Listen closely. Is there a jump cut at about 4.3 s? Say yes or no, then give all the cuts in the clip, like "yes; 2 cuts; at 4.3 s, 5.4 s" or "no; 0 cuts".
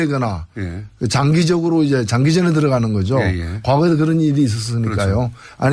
yes; 1 cut; at 4.3 s